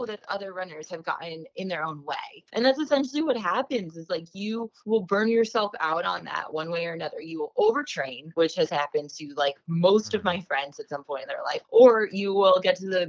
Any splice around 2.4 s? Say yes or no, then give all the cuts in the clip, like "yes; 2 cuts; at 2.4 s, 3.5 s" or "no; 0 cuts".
yes; 2 cuts; at 2.4 s, 11.6 s